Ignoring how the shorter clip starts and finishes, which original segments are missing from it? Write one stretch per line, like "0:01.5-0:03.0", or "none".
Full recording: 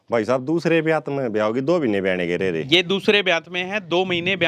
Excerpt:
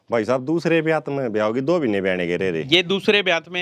none